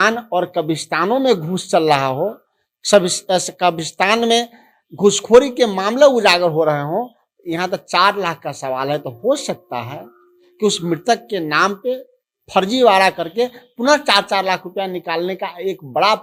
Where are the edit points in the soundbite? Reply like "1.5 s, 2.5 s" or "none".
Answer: none